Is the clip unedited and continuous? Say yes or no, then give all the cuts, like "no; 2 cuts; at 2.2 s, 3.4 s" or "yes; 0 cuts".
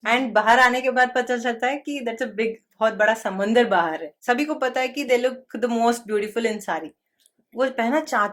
no; 1 cut; at 4.1 s